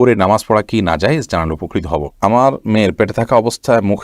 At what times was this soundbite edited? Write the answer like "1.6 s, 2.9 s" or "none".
2.1 s